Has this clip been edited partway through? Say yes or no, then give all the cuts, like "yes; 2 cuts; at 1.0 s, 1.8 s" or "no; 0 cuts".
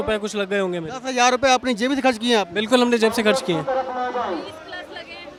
no; 0 cuts